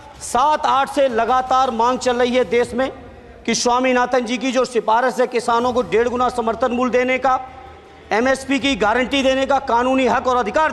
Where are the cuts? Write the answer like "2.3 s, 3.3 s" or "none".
none